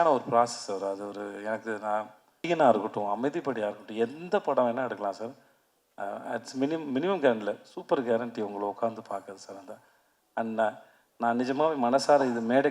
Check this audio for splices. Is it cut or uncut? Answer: cut